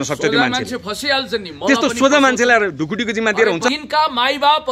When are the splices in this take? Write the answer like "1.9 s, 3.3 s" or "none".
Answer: 3.7 s